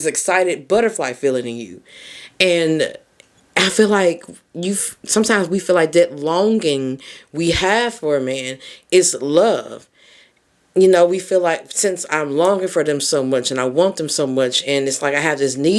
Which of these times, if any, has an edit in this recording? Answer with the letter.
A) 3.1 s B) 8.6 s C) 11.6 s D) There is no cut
D